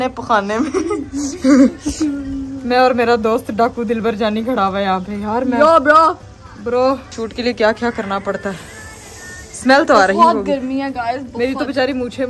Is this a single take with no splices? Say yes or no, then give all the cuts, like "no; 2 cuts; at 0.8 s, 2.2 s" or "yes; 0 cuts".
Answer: yes; 0 cuts